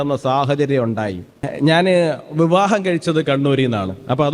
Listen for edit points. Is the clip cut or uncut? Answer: cut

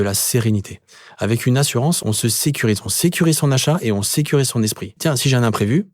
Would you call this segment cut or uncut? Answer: cut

